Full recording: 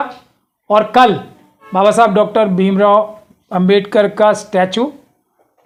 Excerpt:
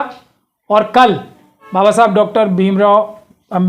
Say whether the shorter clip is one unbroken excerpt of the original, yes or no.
yes